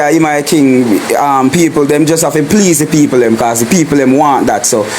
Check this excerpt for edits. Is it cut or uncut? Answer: uncut